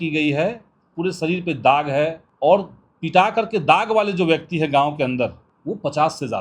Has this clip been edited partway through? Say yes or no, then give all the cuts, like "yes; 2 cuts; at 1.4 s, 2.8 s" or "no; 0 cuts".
yes; 2 cuts; at 2.2 s, 5.5 s